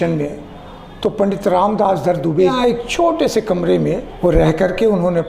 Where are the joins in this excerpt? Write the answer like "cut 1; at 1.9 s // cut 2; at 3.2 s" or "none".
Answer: cut 1; at 2.5 s // cut 2; at 4.1 s